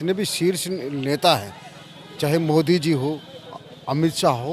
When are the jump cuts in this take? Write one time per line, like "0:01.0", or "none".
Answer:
none